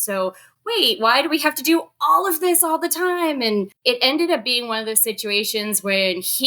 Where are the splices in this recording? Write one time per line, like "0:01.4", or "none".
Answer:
0:03.7